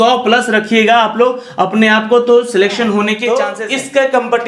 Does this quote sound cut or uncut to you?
cut